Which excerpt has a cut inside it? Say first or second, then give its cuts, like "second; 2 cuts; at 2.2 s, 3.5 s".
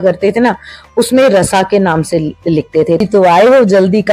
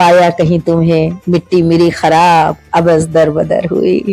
first; 1 cut; at 3.0 s